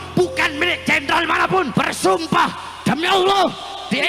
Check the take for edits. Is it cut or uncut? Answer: cut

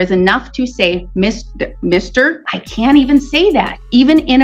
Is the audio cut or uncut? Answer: cut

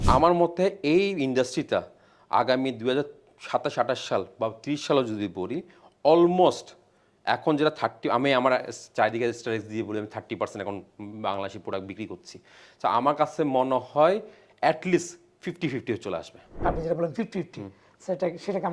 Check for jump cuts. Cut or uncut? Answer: cut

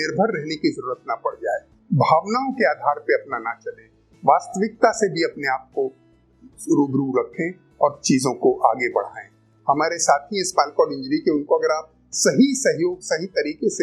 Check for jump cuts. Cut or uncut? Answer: cut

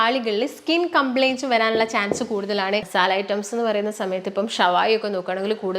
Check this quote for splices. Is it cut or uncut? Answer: cut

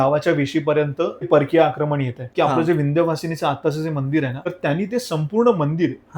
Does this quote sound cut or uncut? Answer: cut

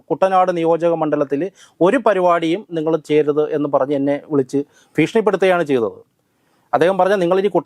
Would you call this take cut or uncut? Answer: uncut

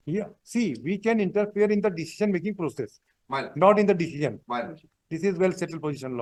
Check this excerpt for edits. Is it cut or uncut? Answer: uncut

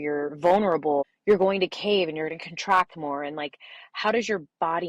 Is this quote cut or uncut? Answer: cut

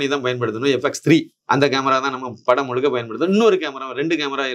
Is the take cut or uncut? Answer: cut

